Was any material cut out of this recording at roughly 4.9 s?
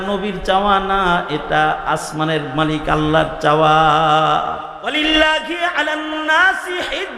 yes; 1 cut; at 4.9 s

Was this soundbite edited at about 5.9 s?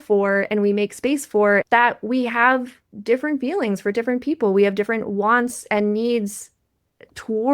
no; 1 cut; at 1.6 s

